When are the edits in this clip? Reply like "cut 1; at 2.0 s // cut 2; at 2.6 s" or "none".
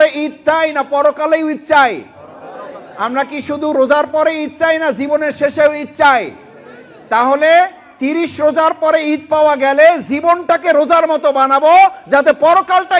none